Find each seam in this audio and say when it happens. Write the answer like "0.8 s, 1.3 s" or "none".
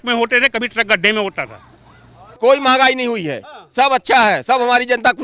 2.3 s